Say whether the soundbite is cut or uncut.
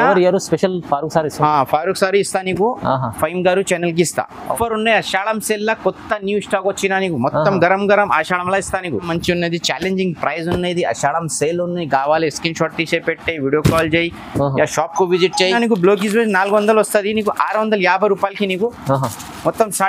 cut